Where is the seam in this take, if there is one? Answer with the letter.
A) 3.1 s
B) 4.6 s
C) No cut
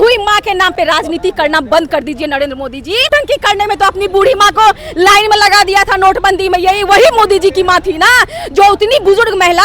A